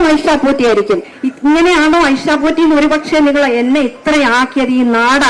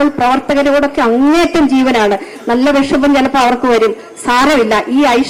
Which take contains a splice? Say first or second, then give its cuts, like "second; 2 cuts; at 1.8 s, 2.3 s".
first; 1 cut; at 1.1 s